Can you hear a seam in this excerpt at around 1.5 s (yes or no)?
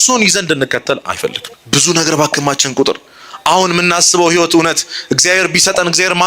yes